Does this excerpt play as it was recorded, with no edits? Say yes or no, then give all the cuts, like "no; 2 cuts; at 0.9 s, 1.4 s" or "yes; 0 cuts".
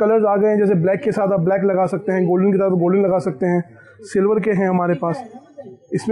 yes; 0 cuts